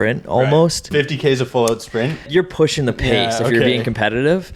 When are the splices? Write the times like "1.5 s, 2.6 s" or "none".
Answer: 0.9 s, 2.3 s